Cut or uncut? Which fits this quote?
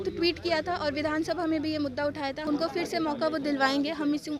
cut